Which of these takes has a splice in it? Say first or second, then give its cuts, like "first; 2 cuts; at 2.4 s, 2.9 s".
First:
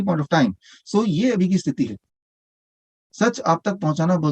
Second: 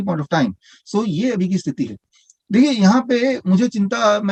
first; 1 cut; at 2.4 s